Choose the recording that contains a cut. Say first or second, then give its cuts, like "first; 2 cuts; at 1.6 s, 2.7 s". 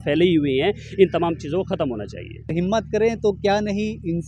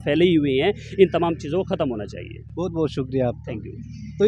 first; 1 cut; at 2.5 s